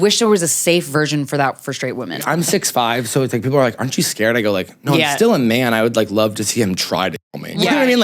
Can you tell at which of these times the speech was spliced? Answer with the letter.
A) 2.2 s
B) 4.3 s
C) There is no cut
A